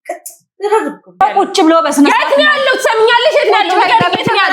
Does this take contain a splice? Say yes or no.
yes